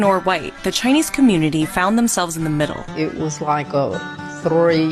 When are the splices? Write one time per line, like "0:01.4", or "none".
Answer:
0:03.1